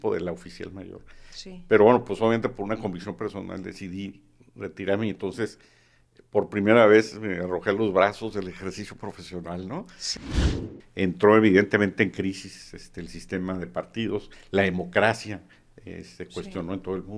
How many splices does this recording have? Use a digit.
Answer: 1